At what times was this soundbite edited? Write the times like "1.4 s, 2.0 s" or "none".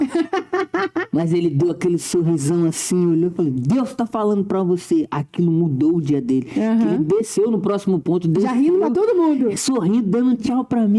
none